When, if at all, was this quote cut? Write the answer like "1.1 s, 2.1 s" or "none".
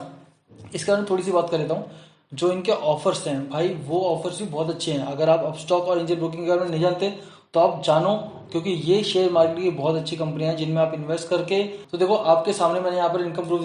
11.9 s